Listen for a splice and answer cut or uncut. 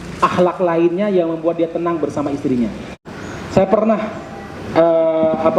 cut